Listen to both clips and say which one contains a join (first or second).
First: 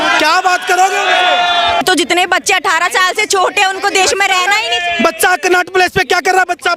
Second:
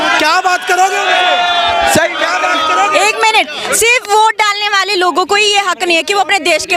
first